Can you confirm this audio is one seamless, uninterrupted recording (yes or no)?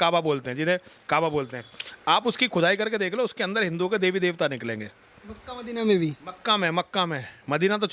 yes